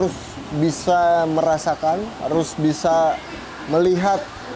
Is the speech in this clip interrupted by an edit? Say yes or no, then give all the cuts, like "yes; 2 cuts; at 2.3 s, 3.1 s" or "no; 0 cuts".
yes; 1 cut; at 2.1 s